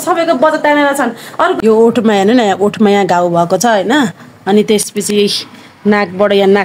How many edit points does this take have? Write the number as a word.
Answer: one